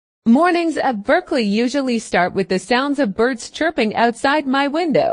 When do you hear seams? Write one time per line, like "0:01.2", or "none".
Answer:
none